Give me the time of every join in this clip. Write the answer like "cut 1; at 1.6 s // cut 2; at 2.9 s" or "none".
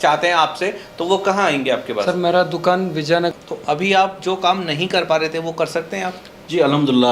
cut 1; at 3.3 s